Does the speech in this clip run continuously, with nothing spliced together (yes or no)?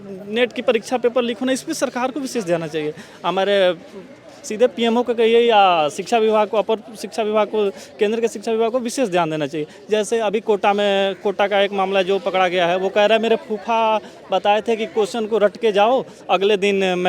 yes